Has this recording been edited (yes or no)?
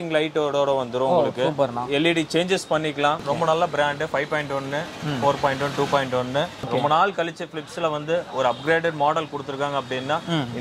yes